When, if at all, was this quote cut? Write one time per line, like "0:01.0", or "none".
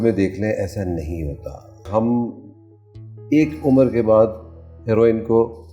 0:01.9